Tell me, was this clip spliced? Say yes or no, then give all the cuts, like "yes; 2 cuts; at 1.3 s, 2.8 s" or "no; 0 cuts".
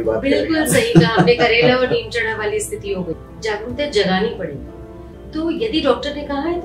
yes; 1 cut; at 3.2 s